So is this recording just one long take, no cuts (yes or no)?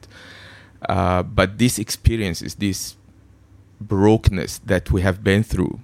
yes